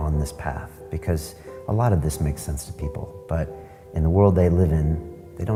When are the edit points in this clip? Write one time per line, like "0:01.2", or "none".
none